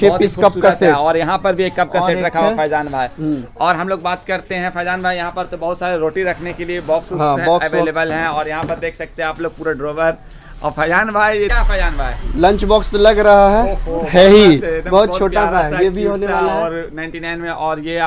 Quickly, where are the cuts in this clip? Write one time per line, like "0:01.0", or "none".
none

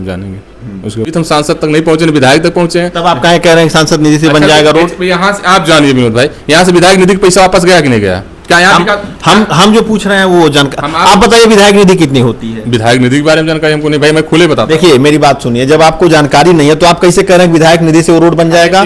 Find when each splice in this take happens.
0:01.1

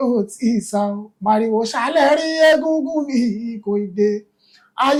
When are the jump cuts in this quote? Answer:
none

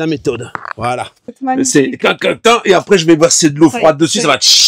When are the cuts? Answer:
0:01.3

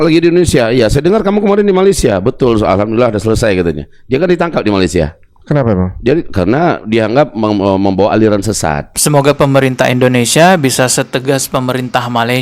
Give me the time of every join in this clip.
0:08.9

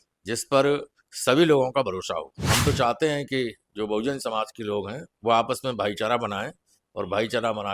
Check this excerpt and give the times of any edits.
0:02.5

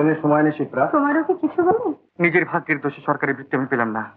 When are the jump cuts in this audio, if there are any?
0:02.1

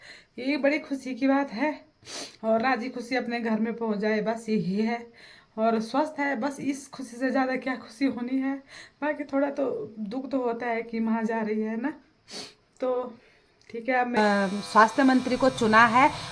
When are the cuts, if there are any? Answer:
0:14.2

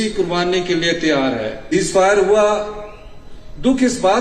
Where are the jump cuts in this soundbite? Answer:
0:01.7

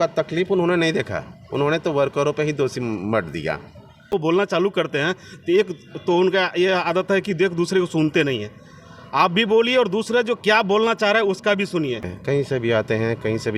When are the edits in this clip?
0:04.2
0:12.1

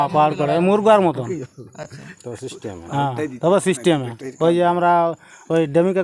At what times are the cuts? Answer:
none

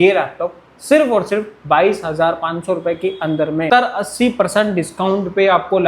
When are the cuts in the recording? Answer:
0:03.7

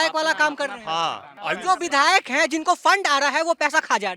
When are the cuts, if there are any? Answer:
0:01.3

